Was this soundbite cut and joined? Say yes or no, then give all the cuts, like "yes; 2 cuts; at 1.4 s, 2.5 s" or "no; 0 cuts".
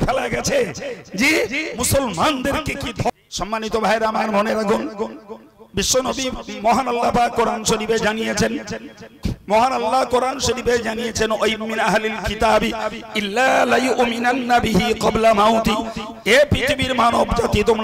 yes; 1 cut; at 3.1 s